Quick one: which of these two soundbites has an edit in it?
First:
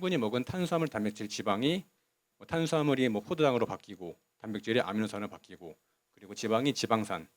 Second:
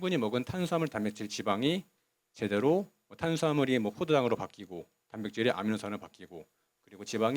first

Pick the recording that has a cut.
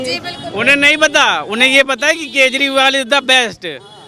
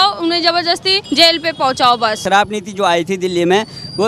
second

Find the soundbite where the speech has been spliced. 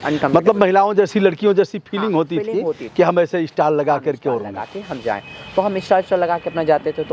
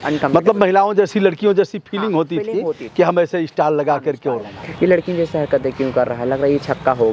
second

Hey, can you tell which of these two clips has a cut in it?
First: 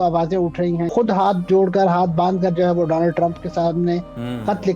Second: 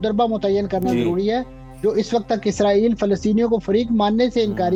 first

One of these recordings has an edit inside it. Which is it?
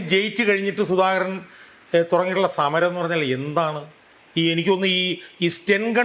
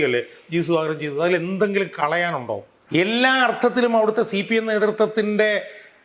second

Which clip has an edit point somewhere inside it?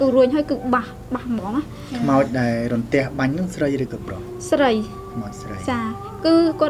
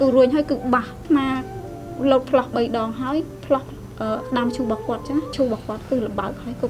second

